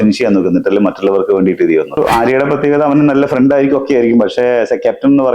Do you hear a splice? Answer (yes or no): yes